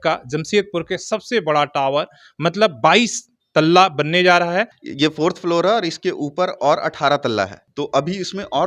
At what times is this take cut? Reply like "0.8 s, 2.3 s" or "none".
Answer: 4.8 s, 7.6 s